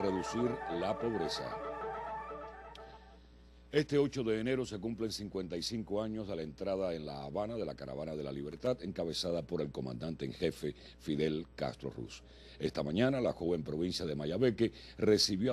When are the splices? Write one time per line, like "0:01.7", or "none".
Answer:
none